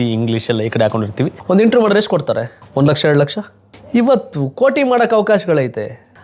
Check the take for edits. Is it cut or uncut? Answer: cut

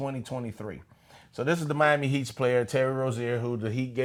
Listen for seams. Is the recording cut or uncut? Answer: uncut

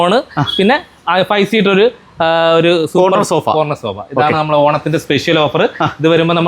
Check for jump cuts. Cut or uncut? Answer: uncut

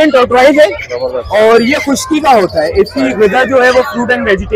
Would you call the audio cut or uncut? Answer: uncut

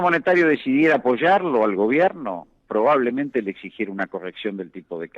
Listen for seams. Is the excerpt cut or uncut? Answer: uncut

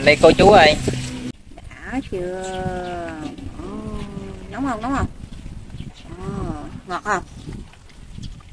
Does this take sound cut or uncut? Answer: cut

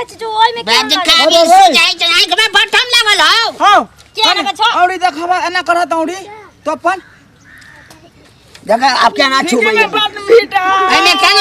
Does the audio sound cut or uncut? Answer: uncut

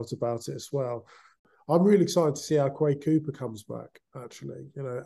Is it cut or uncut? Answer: cut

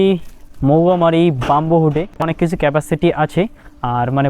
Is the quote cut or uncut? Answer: cut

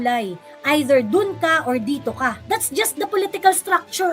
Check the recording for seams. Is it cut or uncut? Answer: cut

